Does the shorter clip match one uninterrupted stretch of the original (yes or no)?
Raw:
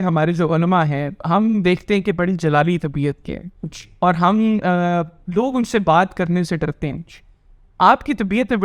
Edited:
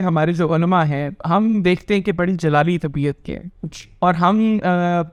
yes